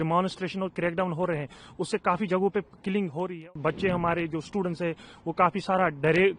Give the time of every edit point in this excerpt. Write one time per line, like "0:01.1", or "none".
0:03.5